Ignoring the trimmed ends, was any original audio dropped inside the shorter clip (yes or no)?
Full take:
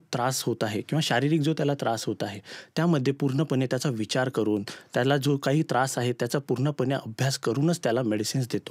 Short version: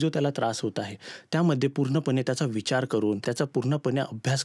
yes